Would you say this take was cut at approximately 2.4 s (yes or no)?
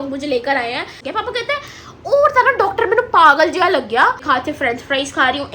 no